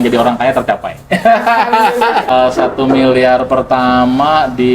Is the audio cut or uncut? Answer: cut